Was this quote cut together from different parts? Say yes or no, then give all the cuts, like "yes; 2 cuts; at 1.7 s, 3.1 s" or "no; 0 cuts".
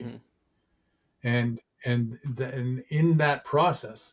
no; 0 cuts